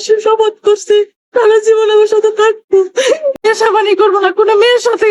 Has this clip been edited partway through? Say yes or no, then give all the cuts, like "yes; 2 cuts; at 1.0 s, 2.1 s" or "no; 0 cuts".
yes; 1 cut; at 3.5 s